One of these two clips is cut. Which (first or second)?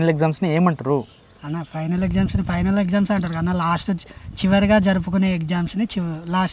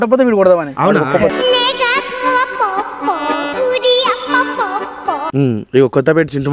second